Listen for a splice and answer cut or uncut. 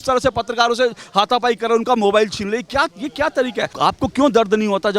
cut